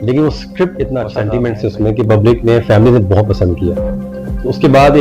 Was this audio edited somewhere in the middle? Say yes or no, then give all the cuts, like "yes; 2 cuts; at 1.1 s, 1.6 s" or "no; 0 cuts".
yes; 1 cut; at 1.1 s